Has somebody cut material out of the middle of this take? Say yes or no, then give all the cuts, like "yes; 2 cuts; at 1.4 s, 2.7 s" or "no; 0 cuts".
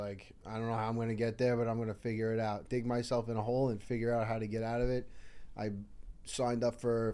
yes; 1 cut; at 2.6 s